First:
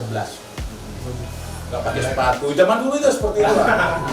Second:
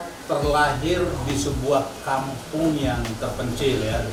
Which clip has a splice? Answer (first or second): first